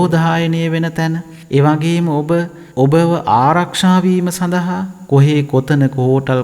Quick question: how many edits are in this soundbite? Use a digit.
2